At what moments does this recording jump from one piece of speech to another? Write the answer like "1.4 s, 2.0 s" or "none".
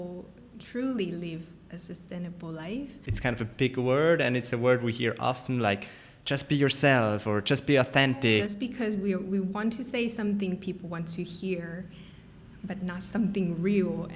3.0 s, 8.4 s